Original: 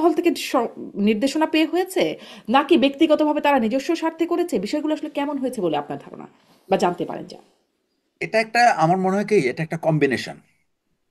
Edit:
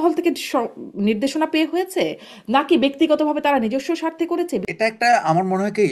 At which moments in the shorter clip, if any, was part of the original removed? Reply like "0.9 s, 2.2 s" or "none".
4.7 s